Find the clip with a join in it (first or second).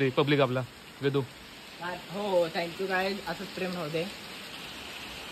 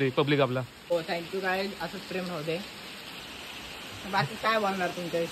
second